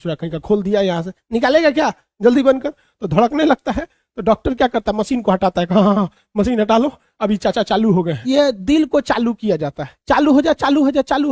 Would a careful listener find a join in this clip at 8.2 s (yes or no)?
yes